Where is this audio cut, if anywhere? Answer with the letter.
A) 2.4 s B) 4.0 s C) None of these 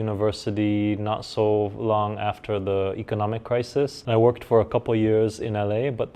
B